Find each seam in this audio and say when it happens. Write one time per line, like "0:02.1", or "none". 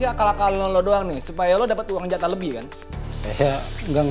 0:03.0